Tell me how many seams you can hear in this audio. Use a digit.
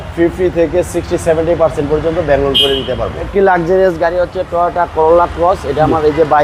1